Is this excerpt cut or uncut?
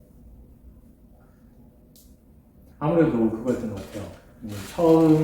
uncut